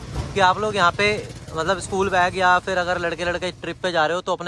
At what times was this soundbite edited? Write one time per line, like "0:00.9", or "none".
none